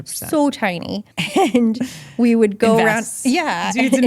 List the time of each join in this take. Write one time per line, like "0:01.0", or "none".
0:01.0